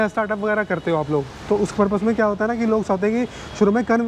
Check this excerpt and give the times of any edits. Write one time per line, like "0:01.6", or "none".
none